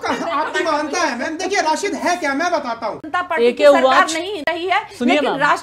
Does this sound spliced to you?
yes; 1 cut; at 3.0 s

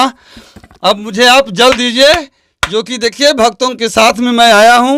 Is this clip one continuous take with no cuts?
yes; 0 cuts

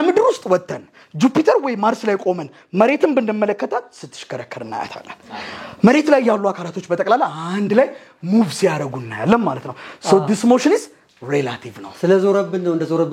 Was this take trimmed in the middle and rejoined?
no; 0 cuts

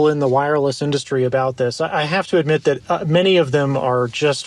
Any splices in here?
no; 0 cuts

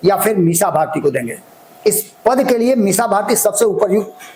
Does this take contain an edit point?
no; 0 cuts

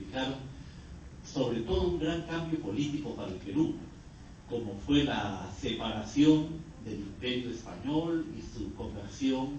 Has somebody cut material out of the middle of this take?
yes; 1 cut; at 6.1 s

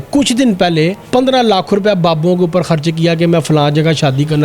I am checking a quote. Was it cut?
yes; 1 cut; at 1.1 s

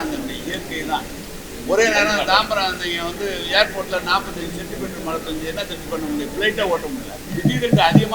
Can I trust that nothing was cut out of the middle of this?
no; 1 cut; at 7.2 s

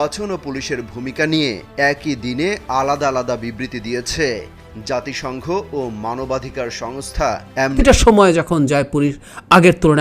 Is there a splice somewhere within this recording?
yes; 1 cut; at 7.8 s

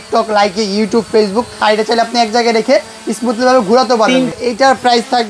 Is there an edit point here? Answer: yes; 2 cuts; at 1.6 s, 4.3 s

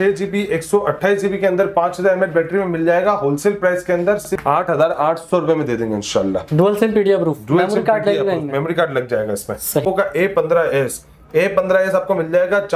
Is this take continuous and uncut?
no; 2 cuts; at 4.3 s, 9.8 s

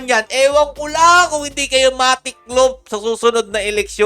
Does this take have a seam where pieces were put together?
no; 0 cuts

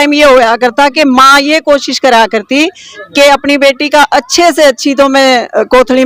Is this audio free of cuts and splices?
yes; 0 cuts

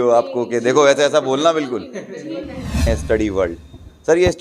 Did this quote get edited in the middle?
yes; 1 cut; at 2.8 s

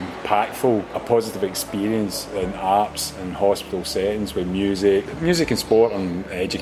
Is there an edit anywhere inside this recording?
yes; 2 cuts; at 0.9 s, 5.1 s

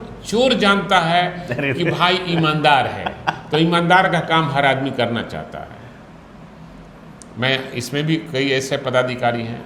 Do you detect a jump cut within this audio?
no; 0 cuts

